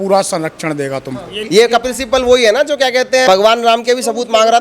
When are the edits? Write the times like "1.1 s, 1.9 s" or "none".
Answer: 1.4 s, 3.3 s